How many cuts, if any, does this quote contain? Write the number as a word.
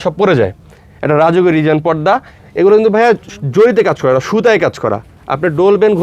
one